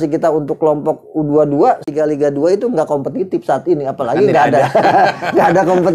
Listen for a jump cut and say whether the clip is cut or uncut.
cut